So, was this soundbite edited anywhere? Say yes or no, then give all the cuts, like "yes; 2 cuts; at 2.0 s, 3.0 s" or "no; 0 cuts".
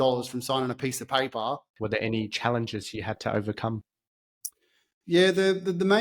yes; 1 cut; at 1.7 s